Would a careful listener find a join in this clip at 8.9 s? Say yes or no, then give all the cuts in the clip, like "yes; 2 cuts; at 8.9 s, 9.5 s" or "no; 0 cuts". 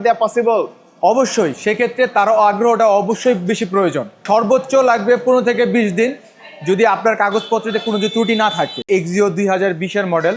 yes; 2 cuts; at 4.2 s, 8.9 s